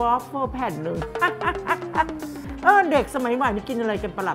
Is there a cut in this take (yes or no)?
yes